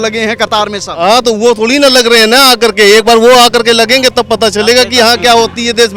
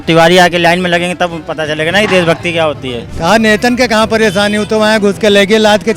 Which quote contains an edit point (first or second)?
second